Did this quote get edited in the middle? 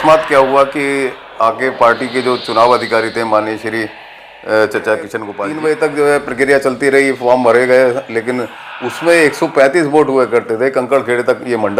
yes; 1 cut; at 5.2 s

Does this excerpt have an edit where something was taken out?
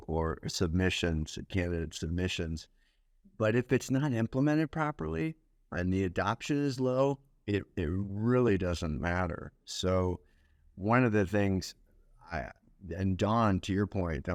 no; 0 cuts

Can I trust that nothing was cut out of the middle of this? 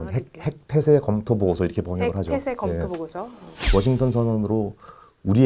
no; 1 cut; at 3.5 s

